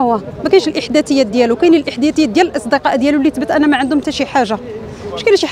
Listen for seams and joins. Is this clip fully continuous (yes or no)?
yes